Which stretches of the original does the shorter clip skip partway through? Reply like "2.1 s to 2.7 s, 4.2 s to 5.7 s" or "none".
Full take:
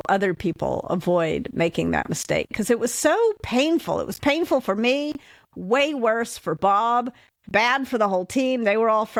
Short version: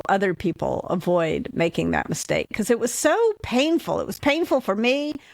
none